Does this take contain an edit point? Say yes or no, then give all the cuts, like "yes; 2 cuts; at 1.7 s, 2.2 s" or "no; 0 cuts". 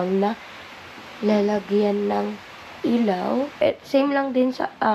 yes; 1 cut; at 3.6 s